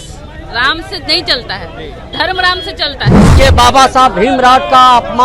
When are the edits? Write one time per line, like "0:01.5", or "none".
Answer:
0:03.3